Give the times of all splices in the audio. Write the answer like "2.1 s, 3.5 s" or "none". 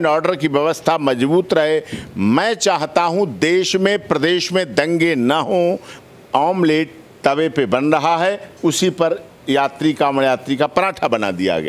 5.9 s